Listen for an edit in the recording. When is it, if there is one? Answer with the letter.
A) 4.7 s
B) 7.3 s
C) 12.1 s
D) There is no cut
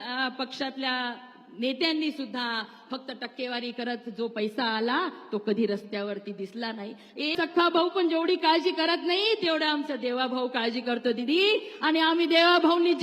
B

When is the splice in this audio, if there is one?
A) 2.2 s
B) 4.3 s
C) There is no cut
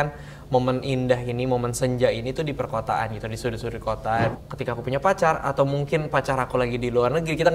B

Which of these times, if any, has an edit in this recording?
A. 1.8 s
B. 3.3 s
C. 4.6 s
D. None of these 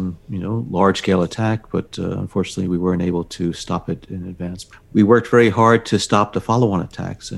C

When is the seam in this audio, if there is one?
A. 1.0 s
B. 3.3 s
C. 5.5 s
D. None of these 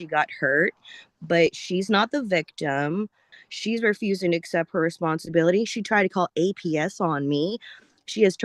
B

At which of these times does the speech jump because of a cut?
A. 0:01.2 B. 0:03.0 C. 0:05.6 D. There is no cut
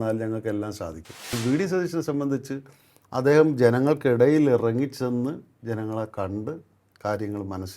A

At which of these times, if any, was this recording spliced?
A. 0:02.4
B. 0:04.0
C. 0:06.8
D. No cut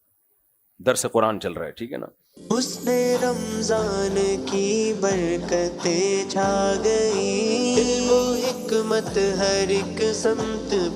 A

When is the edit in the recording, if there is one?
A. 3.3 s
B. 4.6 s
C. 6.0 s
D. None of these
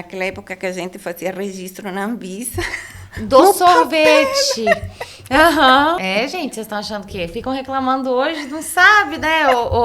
C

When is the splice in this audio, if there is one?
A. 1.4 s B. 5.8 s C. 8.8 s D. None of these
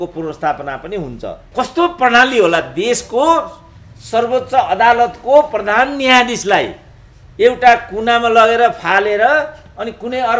A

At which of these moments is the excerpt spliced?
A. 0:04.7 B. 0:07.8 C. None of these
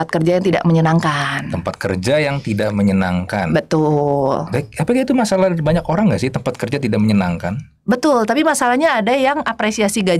C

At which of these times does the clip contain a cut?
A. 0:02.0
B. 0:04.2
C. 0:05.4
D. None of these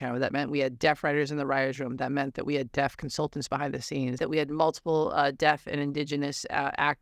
B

